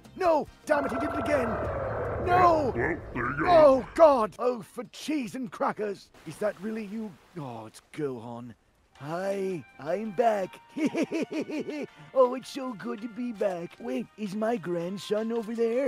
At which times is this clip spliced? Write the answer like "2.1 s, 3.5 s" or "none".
none

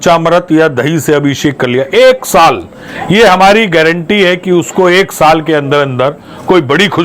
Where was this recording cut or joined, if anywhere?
none

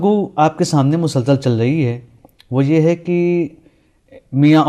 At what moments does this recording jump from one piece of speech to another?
3.6 s

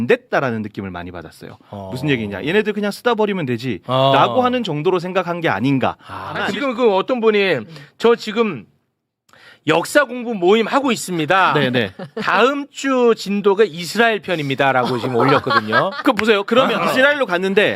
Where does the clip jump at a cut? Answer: 6.4 s, 16.8 s

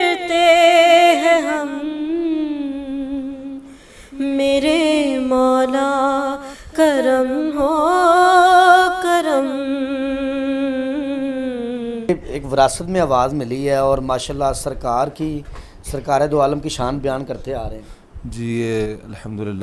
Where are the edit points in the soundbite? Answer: 12.1 s

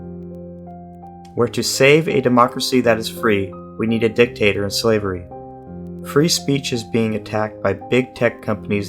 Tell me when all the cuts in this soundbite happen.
1.3 s

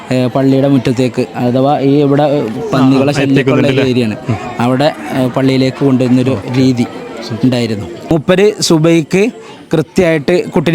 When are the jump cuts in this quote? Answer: 8.1 s

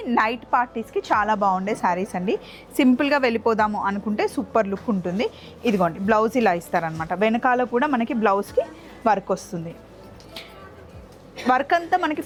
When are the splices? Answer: none

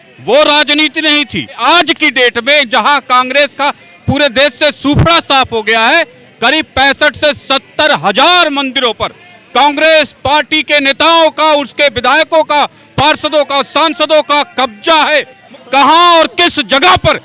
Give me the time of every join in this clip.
1.6 s, 15.4 s

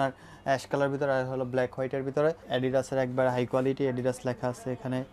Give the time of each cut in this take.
2.4 s

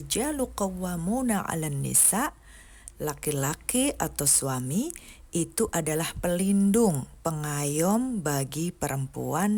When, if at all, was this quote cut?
none

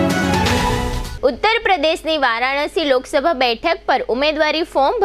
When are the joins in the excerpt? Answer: 1.0 s

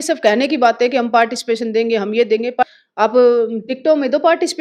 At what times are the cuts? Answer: 2.6 s

